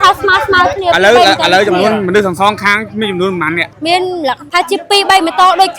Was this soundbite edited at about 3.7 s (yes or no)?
yes